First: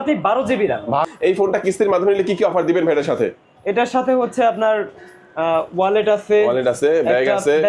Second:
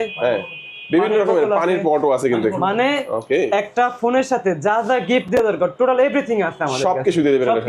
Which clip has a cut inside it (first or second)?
first